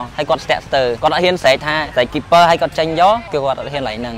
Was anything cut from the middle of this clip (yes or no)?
yes